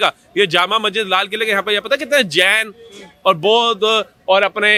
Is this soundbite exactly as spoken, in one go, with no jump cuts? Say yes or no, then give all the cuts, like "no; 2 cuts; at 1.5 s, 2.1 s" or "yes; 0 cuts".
yes; 0 cuts